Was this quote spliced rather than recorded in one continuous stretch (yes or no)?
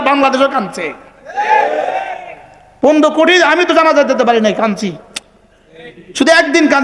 no